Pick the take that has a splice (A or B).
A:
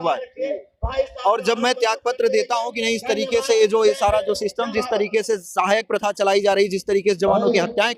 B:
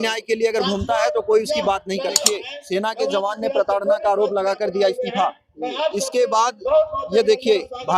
B